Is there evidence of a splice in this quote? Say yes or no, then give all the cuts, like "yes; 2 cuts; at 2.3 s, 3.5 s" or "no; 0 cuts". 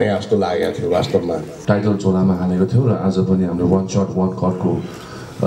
yes; 1 cut; at 1.5 s